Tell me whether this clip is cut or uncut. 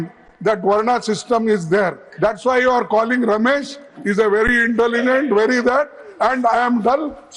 uncut